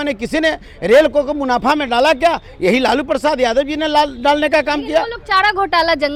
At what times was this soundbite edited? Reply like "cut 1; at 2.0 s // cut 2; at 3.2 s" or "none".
none